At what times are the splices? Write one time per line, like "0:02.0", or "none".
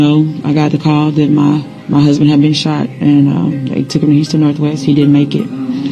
none